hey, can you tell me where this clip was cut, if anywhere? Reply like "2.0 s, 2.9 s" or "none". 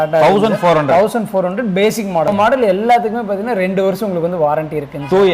2.3 s